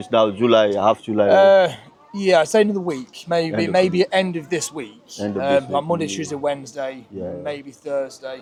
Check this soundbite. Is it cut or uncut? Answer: uncut